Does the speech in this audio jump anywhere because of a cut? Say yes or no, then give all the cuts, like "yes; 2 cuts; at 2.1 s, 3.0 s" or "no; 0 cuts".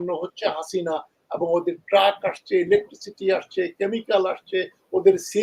no; 0 cuts